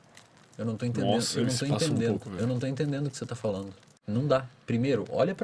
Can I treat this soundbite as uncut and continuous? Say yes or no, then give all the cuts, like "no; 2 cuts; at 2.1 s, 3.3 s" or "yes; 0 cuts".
no; 1 cut; at 3.9 s